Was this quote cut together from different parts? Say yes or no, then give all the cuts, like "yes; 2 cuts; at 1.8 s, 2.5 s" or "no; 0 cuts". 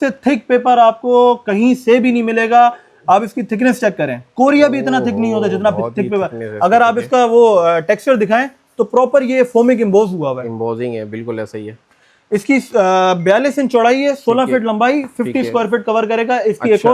no; 0 cuts